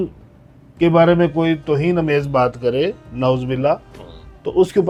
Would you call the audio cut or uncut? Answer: uncut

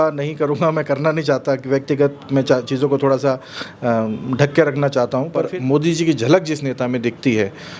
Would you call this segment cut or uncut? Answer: cut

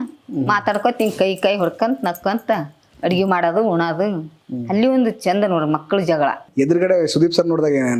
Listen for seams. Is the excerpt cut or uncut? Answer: cut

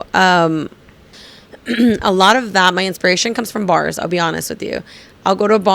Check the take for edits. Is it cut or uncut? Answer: cut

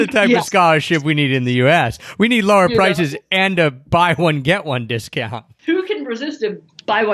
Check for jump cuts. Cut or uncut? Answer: cut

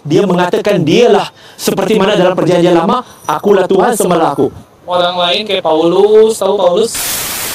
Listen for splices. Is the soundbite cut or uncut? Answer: uncut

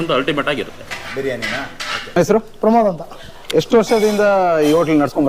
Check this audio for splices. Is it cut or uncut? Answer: cut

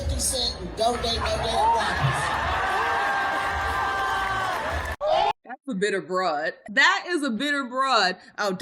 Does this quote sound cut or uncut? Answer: uncut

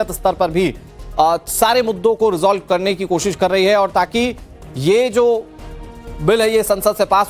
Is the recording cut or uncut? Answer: cut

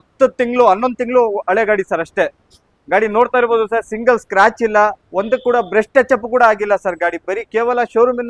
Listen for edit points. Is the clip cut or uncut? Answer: uncut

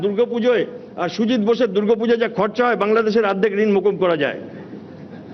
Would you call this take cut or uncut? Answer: uncut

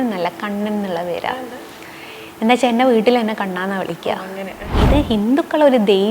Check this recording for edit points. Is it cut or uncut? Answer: cut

